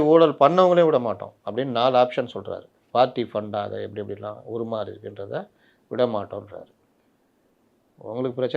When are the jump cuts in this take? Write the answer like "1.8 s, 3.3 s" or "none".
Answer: 2.7 s